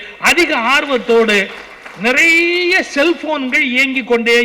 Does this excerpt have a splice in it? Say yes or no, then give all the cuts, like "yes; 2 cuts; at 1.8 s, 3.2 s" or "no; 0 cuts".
no; 0 cuts